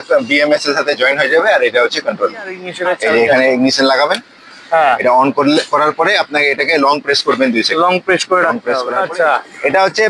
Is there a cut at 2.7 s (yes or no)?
yes